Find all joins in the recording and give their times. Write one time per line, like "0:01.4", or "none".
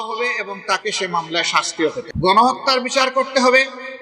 0:02.1

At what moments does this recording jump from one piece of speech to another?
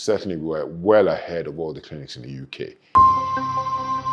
0:02.8

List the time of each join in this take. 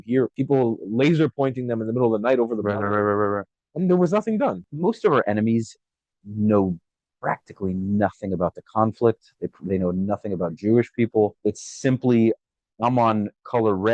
0:04.7

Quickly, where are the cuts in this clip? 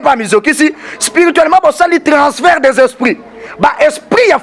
0:03.4

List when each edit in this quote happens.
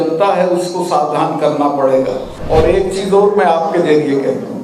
0:02.4

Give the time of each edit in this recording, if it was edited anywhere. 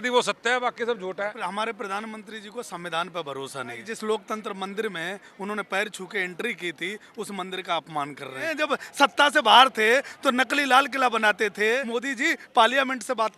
0:01.4
0:03.9
0:08.5
0:11.8

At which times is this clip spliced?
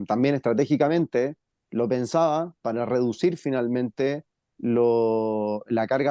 none

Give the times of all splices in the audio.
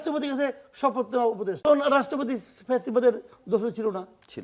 0:01.6

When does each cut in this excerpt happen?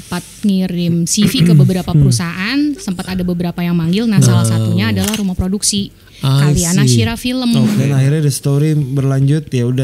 0:07.8

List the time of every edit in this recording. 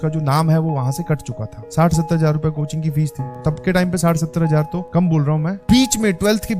0:01.6
0:03.3
0:05.6

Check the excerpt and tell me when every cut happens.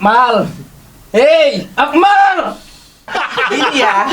0:03.1

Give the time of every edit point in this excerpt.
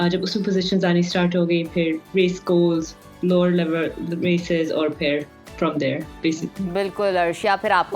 none

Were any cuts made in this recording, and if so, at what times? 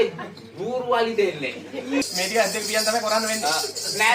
0:02.1

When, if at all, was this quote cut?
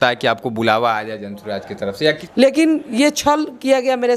0:02.2

